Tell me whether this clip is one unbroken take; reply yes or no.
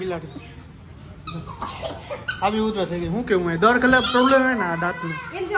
yes